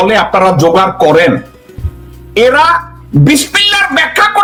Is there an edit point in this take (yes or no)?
no